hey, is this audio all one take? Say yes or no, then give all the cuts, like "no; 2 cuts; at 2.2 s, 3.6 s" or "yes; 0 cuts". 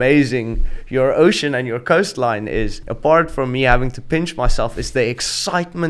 no; 1 cut; at 2.8 s